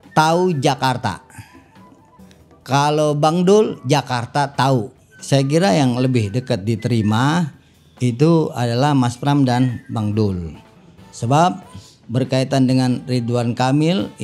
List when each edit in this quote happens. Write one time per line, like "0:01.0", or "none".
0:05.1